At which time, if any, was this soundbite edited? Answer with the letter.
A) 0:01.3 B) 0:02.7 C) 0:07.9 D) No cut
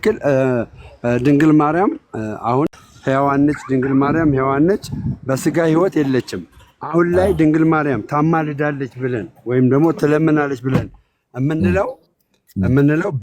B